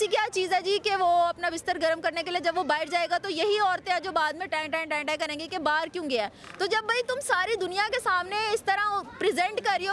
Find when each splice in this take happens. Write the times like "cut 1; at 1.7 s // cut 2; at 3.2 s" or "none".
none